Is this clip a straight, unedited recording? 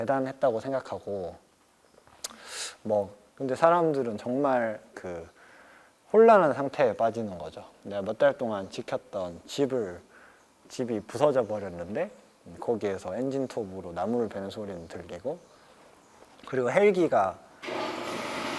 no; 1 cut; at 3.2 s

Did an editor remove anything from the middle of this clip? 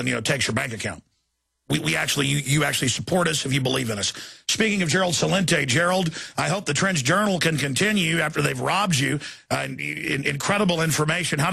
no; 0 cuts

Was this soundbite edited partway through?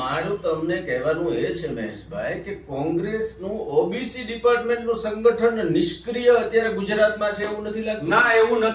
no; 0 cuts

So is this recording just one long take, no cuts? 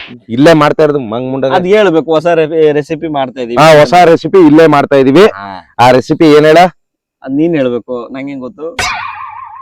yes; 0 cuts

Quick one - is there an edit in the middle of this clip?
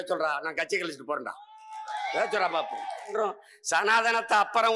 yes; 1 cut; at 3.1 s

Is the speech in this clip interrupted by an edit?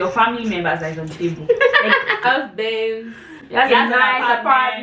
yes; 1 cut; at 2.2 s

